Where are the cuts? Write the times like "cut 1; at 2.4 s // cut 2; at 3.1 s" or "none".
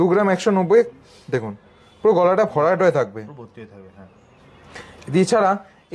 none